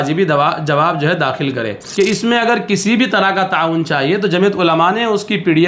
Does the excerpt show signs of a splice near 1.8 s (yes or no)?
yes